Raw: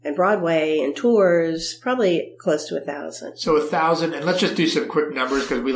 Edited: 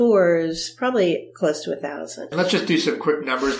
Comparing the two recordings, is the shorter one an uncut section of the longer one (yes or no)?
no